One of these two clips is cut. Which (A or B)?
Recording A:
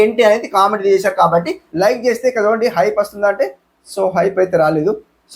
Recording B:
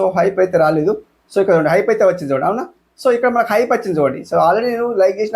A